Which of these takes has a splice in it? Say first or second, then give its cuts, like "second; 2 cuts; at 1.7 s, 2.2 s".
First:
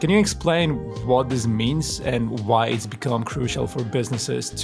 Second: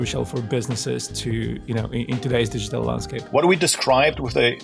second; 1 cut; at 3.1 s